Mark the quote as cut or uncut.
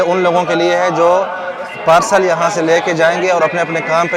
uncut